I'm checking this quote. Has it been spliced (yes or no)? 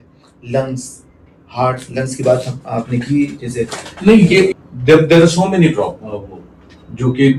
no